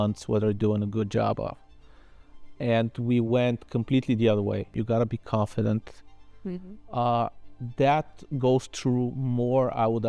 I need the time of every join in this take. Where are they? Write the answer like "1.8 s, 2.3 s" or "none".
4.7 s